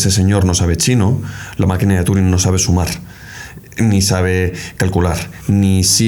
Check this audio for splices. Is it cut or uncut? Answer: uncut